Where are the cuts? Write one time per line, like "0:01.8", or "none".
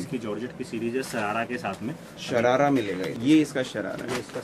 0:03.1